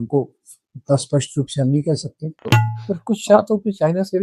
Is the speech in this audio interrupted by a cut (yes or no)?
yes